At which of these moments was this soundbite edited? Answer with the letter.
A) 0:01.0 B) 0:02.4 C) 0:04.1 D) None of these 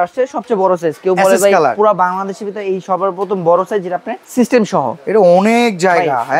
C